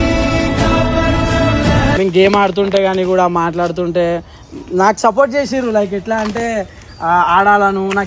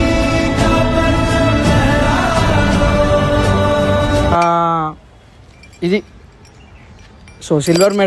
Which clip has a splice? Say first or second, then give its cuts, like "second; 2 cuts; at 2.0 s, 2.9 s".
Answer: first; 1 cut; at 1.9 s